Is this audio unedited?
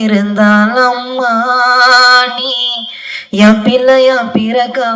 yes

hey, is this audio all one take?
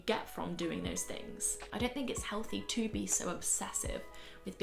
no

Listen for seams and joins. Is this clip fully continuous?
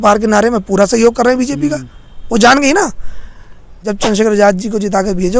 no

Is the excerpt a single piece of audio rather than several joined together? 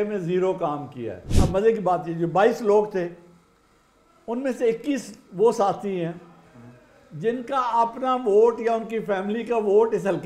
no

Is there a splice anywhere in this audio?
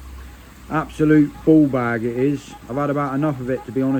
no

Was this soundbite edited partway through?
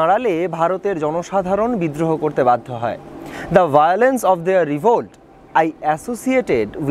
no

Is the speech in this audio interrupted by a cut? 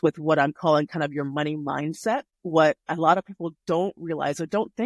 yes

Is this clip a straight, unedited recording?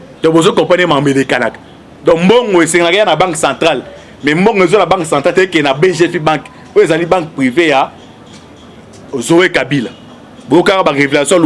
yes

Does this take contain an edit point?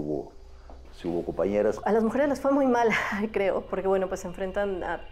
yes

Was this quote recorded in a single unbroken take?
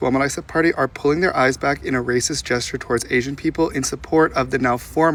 yes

